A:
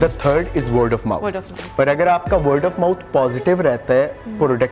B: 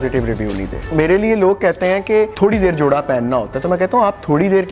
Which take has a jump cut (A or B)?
B